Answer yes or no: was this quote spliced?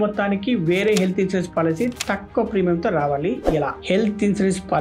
yes